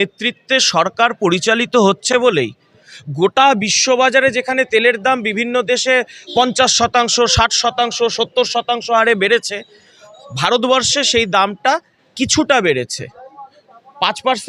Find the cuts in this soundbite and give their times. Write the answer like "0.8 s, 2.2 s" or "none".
none